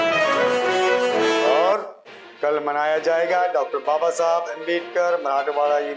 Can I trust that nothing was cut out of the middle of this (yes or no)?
no